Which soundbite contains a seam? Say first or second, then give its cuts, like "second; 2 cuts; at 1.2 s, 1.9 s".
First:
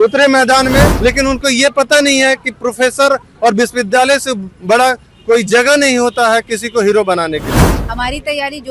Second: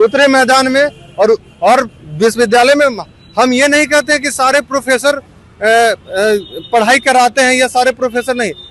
first; 2 cuts; at 0.9 s, 7.8 s